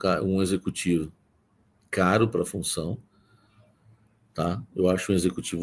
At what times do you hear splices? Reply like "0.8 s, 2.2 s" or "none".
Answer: none